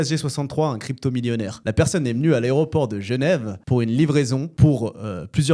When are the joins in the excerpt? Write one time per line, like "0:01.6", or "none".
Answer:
none